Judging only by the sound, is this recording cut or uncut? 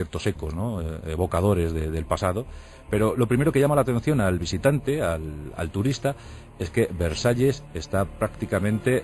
uncut